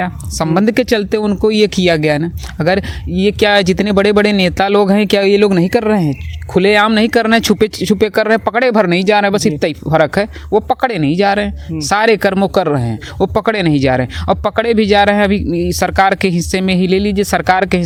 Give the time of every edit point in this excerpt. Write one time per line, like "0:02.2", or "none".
none